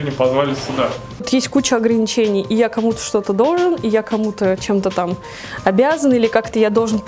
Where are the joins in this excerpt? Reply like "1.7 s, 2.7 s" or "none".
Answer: 1.3 s